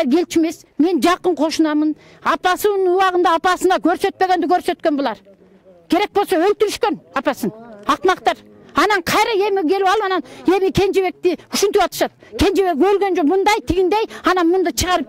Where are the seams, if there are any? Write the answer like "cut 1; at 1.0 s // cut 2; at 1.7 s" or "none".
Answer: none